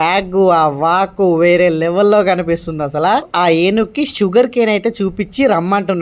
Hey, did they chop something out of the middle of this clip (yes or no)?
yes